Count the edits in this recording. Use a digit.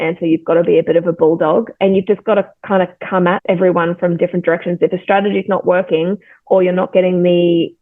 1